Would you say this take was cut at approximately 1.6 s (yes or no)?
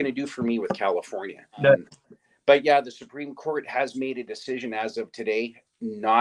yes